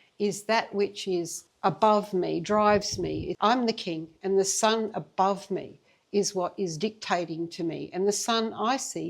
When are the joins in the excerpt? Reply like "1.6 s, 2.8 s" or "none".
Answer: 1.4 s, 3.3 s